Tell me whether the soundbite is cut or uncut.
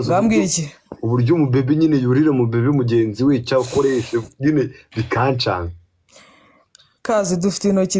uncut